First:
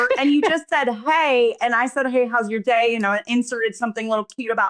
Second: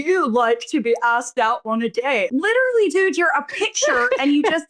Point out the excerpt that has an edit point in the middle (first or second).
second